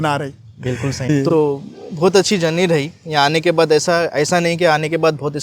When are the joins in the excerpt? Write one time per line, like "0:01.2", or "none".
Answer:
0:01.2